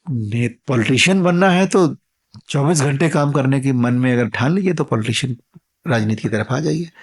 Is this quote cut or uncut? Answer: uncut